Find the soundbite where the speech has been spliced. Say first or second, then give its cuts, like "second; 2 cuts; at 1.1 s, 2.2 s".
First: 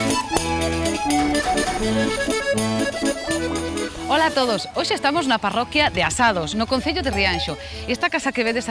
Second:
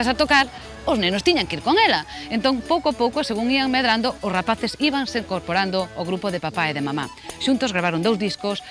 second; 1 cut; at 2.5 s